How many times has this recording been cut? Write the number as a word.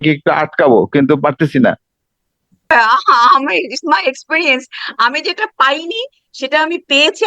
one